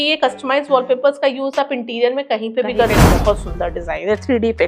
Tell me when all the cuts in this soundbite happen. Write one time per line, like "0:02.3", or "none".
0:03.1